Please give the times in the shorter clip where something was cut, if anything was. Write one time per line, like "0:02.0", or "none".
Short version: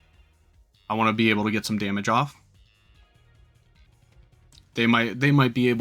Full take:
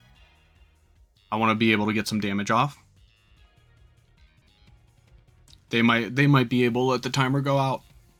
0:03.9